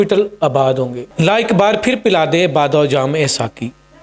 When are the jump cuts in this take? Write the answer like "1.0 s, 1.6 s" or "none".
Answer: 1.0 s